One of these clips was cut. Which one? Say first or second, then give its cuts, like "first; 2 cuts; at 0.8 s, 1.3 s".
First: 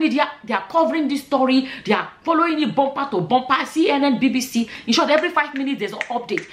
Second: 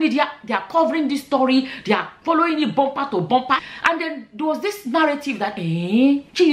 second; 1 cut; at 3.7 s